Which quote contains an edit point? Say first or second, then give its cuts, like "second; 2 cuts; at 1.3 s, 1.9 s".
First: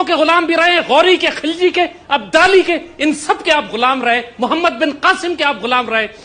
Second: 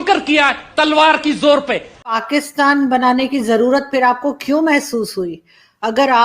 second; 1 cut; at 2.1 s